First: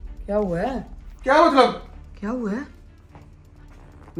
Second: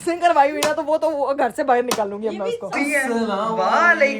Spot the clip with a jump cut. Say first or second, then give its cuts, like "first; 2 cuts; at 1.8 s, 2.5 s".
second; 1 cut; at 2.7 s